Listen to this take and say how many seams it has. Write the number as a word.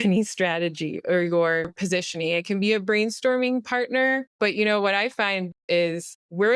three